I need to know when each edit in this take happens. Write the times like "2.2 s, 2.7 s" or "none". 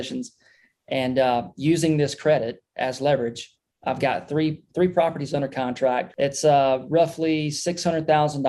6.1 s